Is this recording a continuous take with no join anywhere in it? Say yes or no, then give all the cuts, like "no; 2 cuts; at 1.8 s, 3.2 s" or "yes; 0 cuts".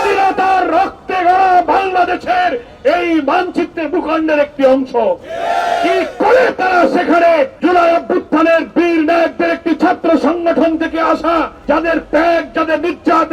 no; 2 cuts; at 7.5 s, 11.5 s